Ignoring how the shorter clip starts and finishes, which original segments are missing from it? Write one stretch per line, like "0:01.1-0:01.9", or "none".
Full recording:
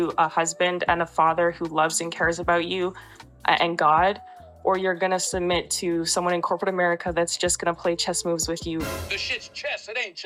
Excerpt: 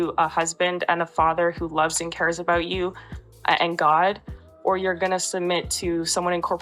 none